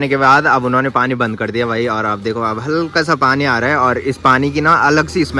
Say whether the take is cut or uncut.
uncut